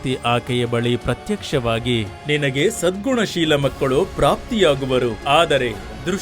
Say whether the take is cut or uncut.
cut